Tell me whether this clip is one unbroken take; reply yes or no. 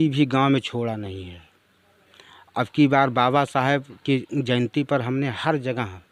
yes